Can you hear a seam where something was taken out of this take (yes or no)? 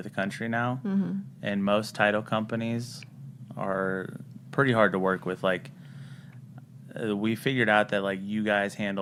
no